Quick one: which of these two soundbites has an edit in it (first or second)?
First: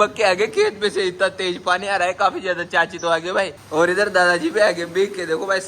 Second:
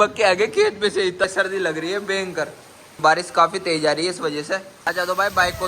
second